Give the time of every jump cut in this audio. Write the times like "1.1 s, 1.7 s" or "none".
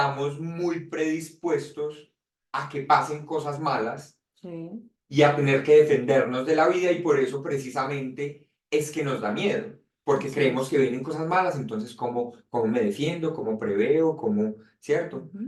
none